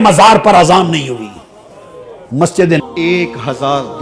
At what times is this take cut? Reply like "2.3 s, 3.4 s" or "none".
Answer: 2.8 s